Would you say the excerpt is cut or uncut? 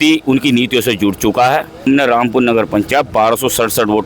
cut